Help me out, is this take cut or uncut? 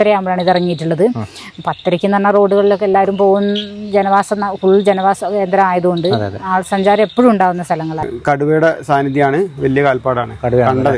cut